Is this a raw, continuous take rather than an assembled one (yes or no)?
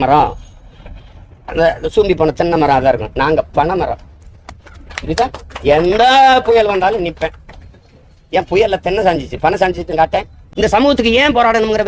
no